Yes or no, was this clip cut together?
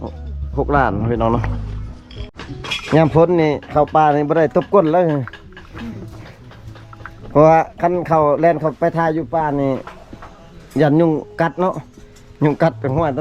yes